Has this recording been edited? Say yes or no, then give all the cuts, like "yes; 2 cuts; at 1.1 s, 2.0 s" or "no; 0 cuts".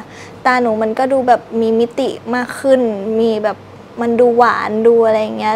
no; 0 cuts